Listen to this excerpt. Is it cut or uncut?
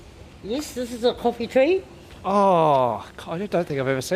uncut